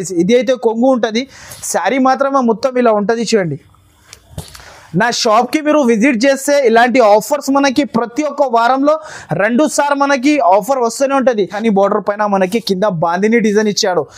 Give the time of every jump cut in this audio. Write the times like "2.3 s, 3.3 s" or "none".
11.5 s